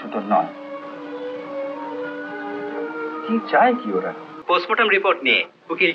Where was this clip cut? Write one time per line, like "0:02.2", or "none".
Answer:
0:04.3